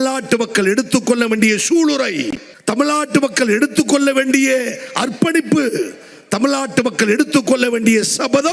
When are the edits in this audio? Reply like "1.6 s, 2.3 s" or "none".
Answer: 2.5 s